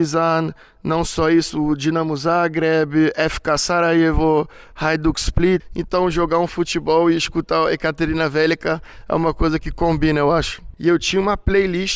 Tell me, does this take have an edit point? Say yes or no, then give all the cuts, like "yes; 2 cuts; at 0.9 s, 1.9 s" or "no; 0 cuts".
yes; 2 cuts; at 5.7 s, 10.6 s